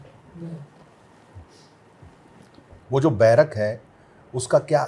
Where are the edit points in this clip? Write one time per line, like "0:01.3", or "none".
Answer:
0:02.8

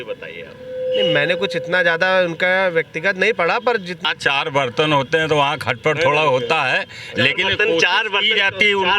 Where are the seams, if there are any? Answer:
0:04.0

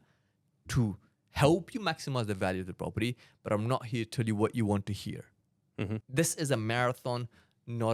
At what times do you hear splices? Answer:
0:06.0

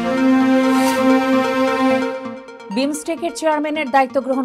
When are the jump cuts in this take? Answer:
none

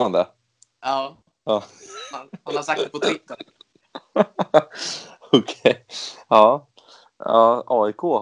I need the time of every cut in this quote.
none

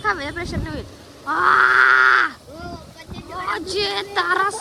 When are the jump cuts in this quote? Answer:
none

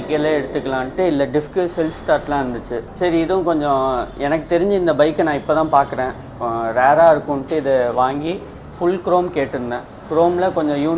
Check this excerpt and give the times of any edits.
0:02.8

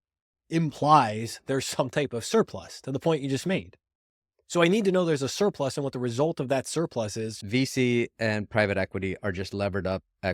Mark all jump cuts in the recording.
0:07.4

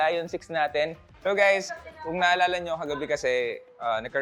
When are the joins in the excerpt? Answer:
0:01.1

